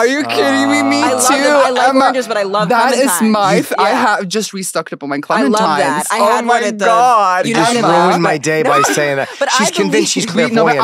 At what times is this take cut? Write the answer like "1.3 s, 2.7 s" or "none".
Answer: none